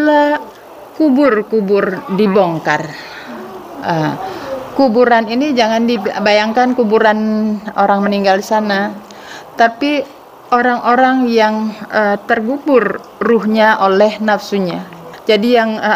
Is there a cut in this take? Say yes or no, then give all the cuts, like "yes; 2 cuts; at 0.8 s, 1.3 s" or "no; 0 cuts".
yes; 1 cut; at 15.1 s